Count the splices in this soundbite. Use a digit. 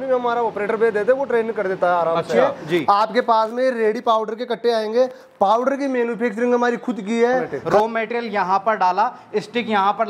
2